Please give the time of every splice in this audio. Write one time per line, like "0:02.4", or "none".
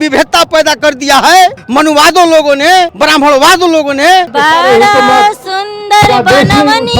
0:01.6
0:03.0
0:04.3